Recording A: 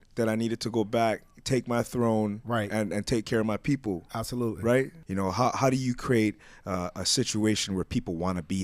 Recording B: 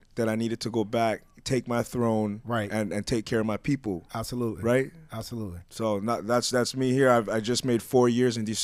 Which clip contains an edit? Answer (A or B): A